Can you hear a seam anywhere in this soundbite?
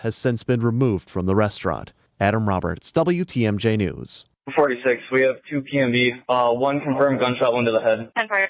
yes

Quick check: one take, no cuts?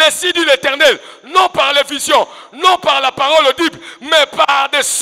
yes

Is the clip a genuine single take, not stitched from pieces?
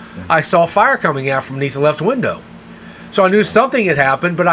yes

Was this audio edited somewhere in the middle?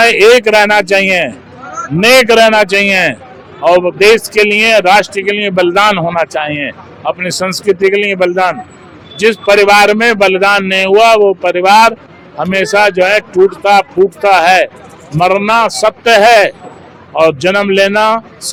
no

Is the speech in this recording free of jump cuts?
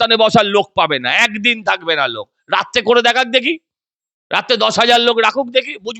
yes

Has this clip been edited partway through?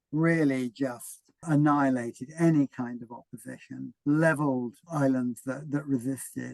yes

